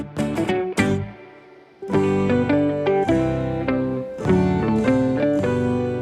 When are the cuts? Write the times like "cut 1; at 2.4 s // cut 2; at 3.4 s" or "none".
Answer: none